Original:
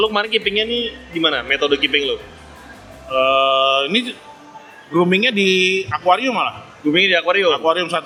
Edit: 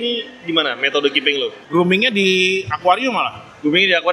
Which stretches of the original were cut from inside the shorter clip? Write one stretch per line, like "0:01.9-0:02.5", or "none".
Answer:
0:02.3-0:04.8